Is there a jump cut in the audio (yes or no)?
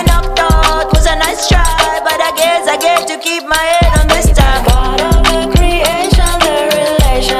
no